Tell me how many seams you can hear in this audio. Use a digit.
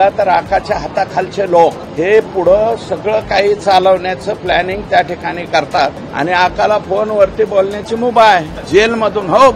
3